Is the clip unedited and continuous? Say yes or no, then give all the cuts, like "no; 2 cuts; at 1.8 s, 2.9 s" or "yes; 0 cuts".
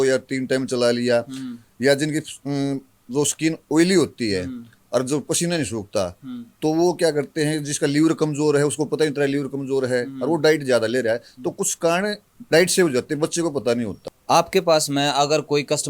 no; 1 cut; at 14.1 s